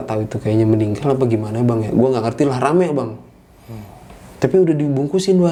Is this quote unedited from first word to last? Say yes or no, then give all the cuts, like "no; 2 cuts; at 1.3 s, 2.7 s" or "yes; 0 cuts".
yes; 0 cuts